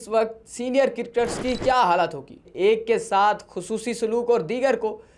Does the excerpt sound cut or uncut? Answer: cut